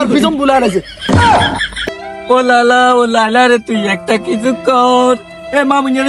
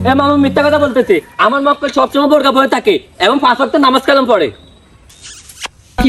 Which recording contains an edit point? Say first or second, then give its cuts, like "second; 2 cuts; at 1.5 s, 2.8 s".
first; 1 cut; at 1.7 s